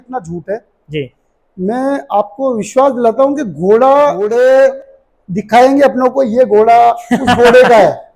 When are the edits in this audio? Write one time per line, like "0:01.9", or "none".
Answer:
0:04.2